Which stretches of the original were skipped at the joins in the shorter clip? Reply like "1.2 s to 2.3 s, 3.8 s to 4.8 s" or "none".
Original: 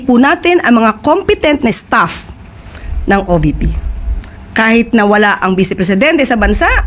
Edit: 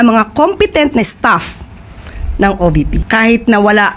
3.7 s to 4.4 s